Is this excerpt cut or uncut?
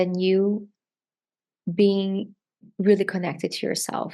cut